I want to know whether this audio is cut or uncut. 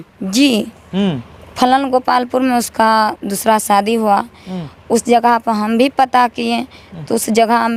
uncut